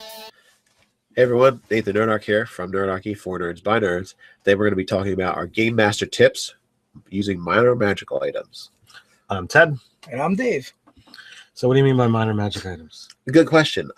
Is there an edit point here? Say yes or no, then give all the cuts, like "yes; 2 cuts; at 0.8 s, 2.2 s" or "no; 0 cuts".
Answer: yes; 1 cut; at 10.3 s